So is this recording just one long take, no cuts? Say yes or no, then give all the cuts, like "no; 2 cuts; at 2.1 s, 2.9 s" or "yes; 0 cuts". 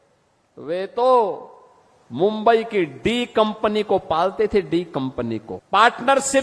no; 1 cut; at 5.5 s